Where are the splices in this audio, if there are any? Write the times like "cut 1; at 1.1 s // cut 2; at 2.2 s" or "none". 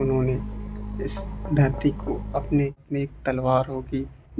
cut 1; at 2.8 s